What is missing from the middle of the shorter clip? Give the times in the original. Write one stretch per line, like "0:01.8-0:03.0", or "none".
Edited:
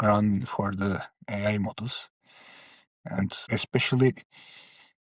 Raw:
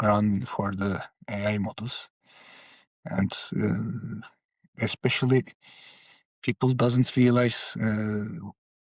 0:03.4-0:04.7